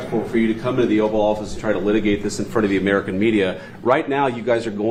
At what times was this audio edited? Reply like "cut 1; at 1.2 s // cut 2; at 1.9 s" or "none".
none